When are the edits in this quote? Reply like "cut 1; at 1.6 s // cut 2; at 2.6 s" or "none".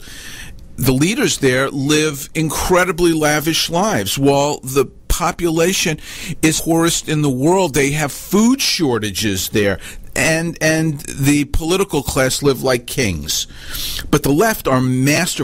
cut 1; at 6.6 s